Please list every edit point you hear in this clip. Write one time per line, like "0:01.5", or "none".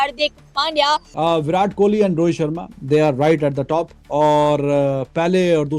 0:01.2